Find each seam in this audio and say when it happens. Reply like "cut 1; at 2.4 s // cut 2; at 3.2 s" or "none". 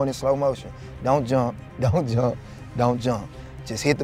none